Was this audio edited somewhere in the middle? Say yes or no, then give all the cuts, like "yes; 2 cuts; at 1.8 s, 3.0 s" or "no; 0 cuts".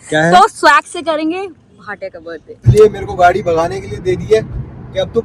yes; 1 cut; at 2.6 s